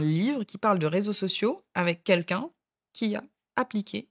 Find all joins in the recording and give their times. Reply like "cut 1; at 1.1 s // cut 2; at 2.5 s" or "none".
none